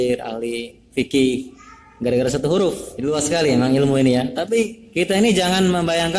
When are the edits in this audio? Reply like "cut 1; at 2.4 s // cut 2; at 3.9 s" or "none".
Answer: cut 1; at 2.9 s // cut 2; at 4.8 s